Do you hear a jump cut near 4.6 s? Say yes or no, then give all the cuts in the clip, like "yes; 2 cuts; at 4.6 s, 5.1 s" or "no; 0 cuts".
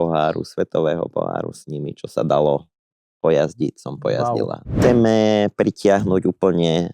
yes; 1 cut; at 4.6 s